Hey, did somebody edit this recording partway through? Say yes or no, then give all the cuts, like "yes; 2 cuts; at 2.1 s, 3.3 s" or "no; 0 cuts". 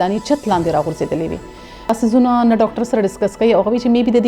yes; 1 cut; at 1.9 s